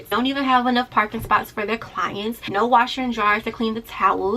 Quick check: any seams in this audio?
no; 0 cuts

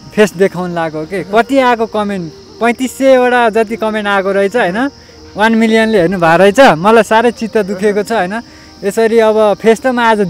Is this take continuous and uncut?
yes; 0 cuts

